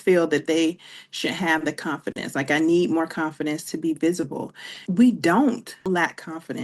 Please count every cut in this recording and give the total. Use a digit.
2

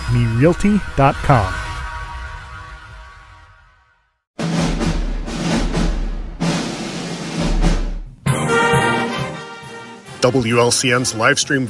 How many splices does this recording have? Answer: 1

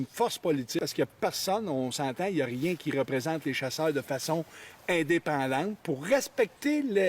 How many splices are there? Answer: 2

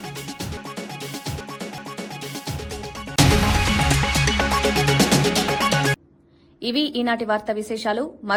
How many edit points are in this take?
0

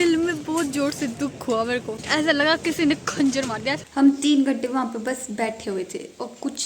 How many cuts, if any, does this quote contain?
2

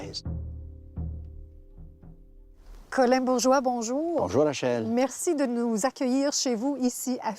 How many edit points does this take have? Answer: 0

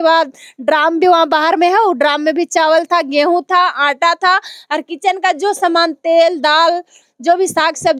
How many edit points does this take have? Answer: 0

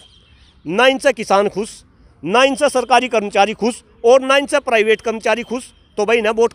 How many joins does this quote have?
0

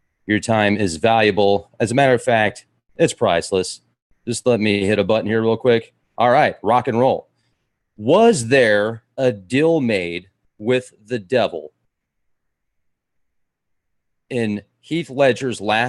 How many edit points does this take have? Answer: 0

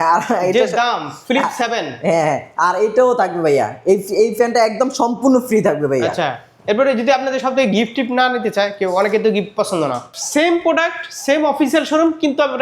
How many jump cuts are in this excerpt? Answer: 1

